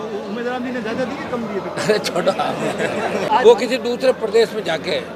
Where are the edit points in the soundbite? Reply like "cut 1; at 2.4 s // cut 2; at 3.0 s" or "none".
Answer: cut 1; at 3.3 s